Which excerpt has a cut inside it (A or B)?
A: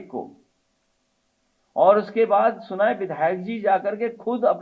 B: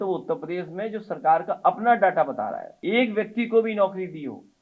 B